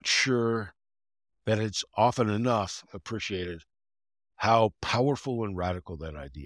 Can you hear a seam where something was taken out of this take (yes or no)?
no